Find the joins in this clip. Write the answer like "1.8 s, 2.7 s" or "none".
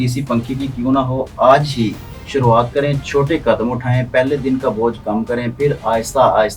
none

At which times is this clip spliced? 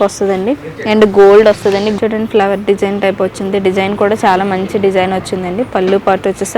2.0 s

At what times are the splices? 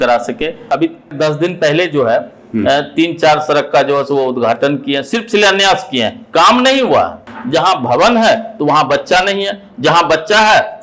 1.1 s, 7.3 s

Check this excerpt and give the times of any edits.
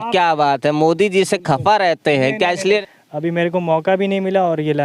2.8 s

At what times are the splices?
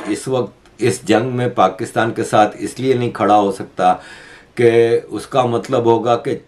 none

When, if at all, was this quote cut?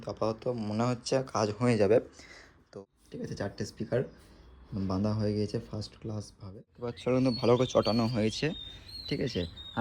2.7 s, 6.8 s

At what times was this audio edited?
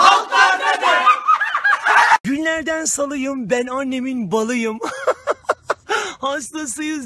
none

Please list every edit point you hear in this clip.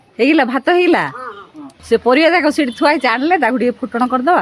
1.7 s

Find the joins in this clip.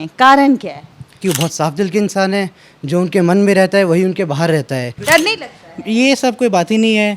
1.2 s, 5.0 s

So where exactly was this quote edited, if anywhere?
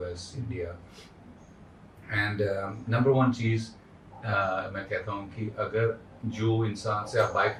none

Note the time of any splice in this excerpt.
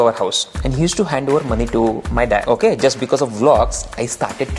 2.4 s

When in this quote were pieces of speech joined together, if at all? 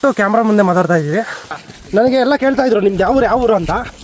1.5 s

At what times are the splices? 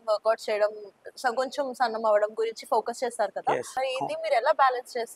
3.7 s

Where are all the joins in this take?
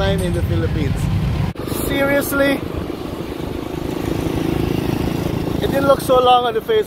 1.5 s

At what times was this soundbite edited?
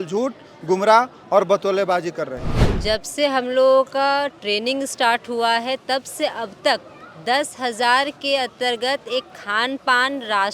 2.6 s

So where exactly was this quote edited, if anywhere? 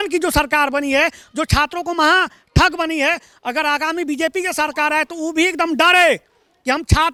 none

